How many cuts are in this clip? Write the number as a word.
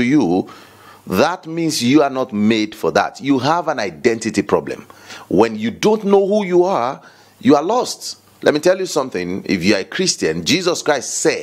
zero